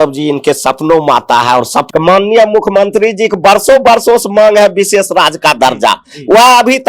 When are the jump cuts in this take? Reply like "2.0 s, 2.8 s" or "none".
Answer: 1.8 s